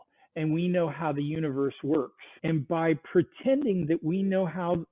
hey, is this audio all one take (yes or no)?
no